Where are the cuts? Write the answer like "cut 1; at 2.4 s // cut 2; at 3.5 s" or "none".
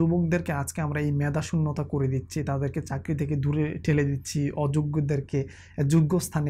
none